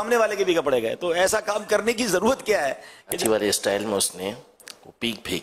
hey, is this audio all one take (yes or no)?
no